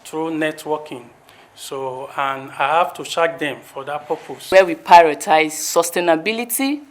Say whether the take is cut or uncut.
cut